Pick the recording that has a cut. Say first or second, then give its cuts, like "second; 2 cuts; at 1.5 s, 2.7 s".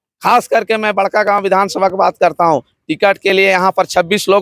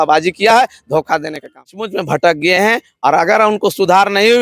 second; 1 cut; at 1.9 s